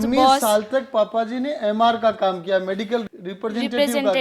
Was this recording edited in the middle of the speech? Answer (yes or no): yes